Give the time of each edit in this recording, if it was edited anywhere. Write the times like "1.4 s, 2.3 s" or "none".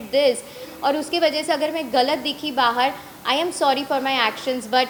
none